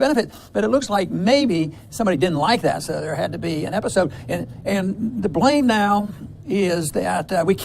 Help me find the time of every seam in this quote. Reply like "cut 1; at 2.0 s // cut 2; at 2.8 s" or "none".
cut 1; at 4.0 s